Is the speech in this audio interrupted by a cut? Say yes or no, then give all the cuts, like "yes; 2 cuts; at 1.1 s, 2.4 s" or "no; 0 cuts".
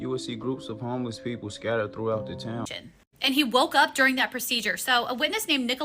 yes; 1 cut; at 2.7 s